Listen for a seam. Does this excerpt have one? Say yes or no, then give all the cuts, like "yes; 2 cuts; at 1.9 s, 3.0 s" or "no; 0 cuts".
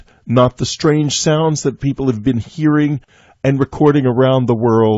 yes; 1 cut; at 3.7 s